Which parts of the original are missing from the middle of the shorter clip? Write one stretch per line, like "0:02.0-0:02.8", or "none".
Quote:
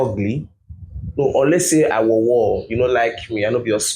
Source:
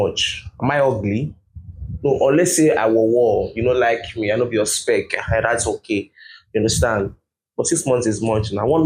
none

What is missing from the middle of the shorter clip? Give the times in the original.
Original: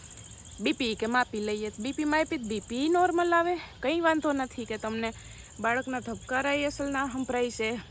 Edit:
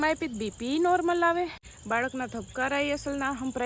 0:03.7-0:05.3

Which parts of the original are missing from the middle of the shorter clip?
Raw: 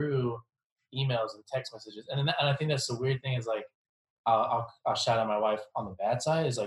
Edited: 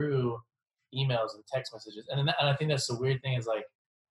none

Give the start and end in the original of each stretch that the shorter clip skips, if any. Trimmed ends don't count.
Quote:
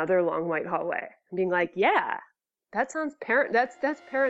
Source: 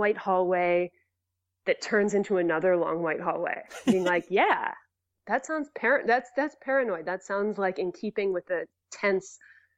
none

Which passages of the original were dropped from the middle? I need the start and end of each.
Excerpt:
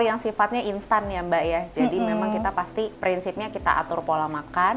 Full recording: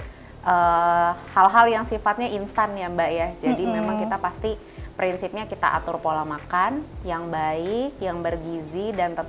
0:04.6-0:04.9

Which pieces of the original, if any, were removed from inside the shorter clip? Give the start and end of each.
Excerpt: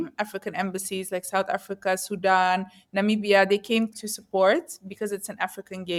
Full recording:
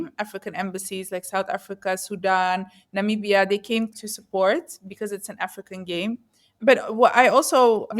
none

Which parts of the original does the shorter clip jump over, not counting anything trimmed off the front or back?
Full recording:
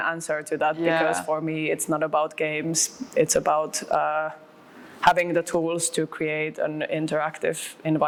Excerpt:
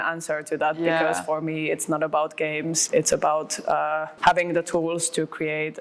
0:02.8-0:03.0
0:04.3-0:04.9

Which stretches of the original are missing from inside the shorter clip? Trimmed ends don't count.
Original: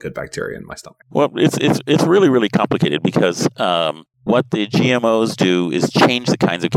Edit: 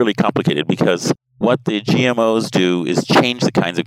0:03.6-0:04.1

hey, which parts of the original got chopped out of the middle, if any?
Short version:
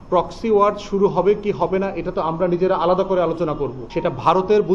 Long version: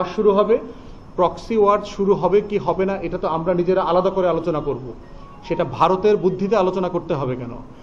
0:04.9-0:05.3

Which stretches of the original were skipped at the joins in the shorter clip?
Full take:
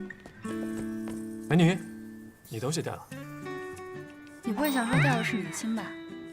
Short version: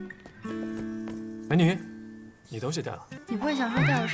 0:03.1-0:04.3

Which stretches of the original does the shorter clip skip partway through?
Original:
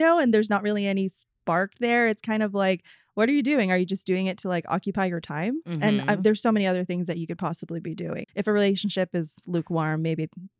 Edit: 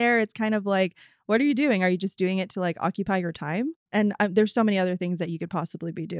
none

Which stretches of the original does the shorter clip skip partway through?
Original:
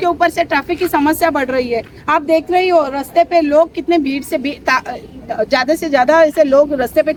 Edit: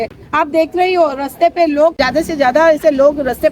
0:03.7-0:05.5

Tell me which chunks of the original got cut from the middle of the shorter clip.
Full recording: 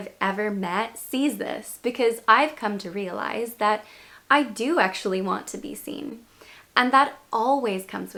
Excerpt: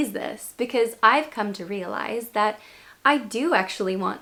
none

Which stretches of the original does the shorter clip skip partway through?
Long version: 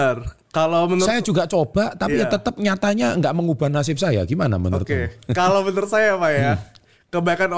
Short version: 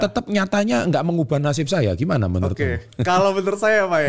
none

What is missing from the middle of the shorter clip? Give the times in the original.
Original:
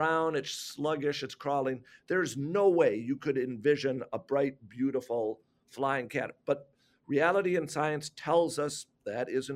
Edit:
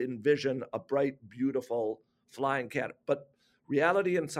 none

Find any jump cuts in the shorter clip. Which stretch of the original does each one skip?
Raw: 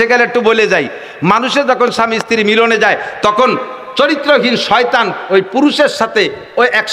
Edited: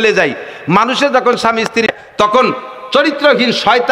0:02.4-0:02.9

